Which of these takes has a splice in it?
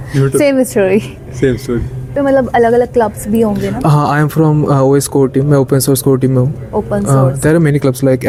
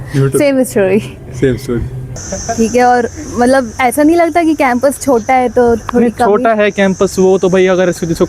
second; 1 cut; at 2.0 s

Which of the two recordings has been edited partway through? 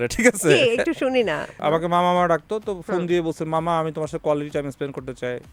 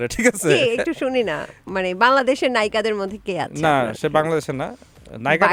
first; 1 cut; at 1.5 s

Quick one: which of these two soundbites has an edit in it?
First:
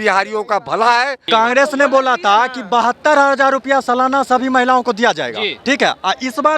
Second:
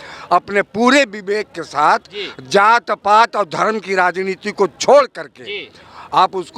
first; 1 cut; at 1.2 s

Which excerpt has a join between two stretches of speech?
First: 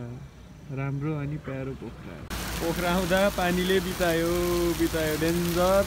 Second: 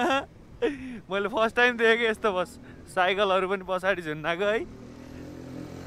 first; 1 cut; at 2.4 s

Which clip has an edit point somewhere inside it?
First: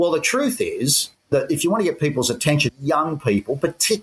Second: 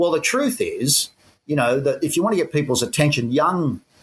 first; 2 cuts; at 1.3 s, 2.7 s

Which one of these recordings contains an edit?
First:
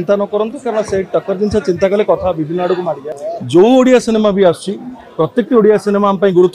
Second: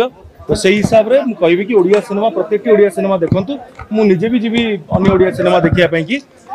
first; 1 cut; at 3.1 s

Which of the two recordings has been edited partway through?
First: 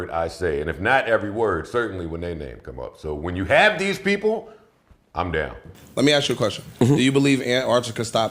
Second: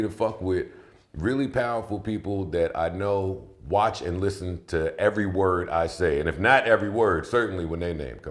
first; 1 cut; at 5.7 s

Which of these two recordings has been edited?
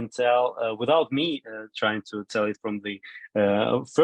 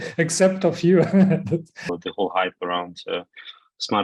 second; 1 cut; at 1.9 s

